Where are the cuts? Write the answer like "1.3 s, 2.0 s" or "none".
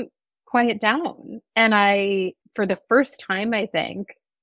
2.4 s